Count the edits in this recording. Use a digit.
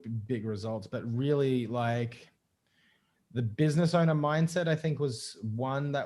0